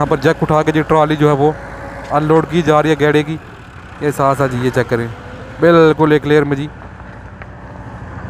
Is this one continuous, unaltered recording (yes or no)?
yes